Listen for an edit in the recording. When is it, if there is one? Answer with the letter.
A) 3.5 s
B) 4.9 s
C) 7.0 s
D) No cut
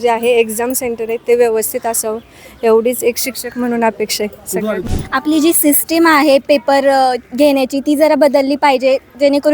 B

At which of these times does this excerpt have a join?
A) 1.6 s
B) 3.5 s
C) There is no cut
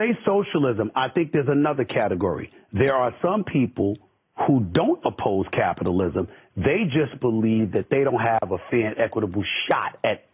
C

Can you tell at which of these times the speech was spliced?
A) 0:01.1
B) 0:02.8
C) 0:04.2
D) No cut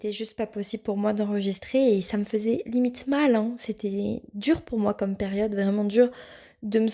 D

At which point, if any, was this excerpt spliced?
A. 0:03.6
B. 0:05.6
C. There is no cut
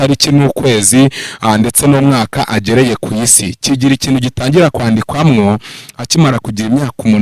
C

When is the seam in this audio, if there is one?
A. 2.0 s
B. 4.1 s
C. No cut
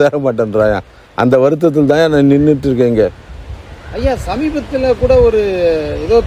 C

